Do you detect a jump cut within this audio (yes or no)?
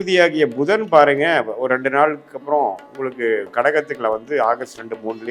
no